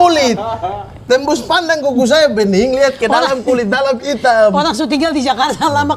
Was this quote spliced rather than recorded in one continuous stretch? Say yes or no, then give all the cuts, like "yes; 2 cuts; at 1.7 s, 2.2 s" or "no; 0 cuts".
no; 0 cuts